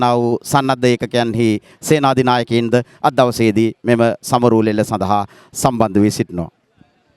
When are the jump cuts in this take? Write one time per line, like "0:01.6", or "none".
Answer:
none